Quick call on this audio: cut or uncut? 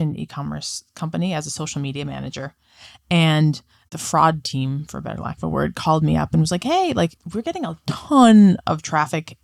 uncut